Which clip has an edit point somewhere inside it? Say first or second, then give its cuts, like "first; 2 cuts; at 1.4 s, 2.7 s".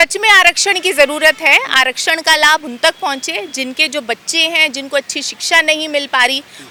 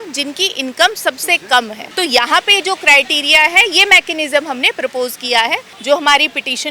second; 2 cuts; at 1.8 s, 5.7 s